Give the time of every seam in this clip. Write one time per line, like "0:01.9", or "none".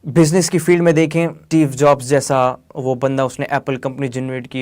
0:01.4

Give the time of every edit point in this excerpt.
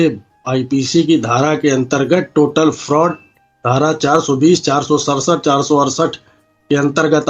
none

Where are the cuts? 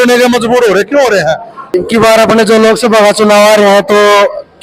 0:01.5

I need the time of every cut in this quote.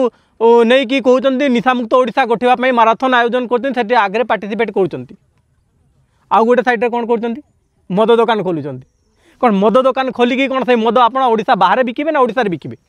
none

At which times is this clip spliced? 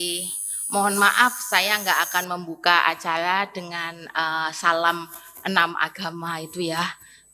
none

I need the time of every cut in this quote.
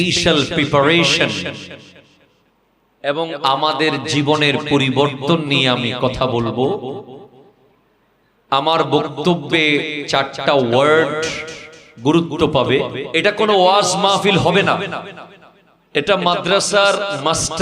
0:13.0

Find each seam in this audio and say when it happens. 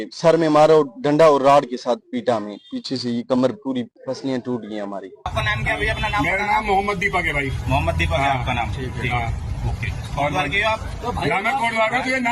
0:04.0
0:05.3

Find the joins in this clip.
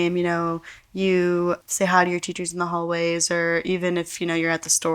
0:01.6

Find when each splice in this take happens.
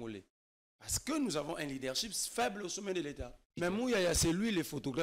0:03.4

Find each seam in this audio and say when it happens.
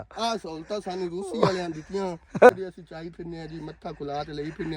0:02.5

